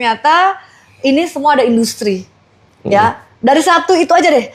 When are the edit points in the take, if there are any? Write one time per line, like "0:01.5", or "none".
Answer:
none